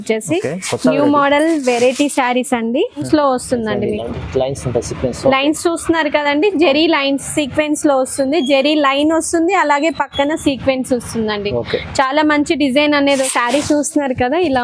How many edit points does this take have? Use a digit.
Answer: 2